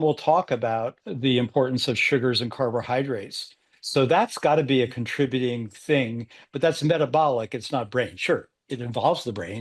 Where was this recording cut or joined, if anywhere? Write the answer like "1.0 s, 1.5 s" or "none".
1.0 s